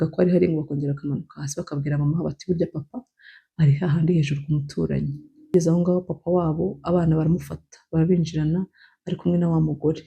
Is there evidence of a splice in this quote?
yes; 1 cut; at 5.5 s

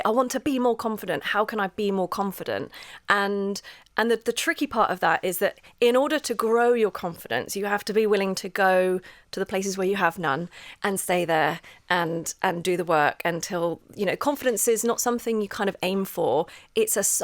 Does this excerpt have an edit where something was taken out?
no; 0 cuts

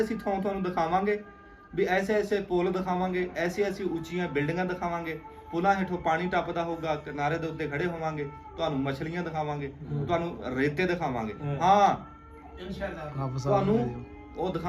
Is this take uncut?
yes; 0 cuts

